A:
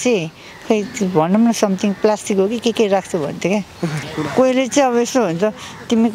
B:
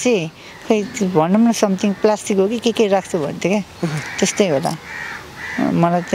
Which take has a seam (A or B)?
A